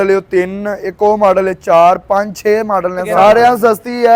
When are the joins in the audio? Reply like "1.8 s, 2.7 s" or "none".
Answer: 3.1 s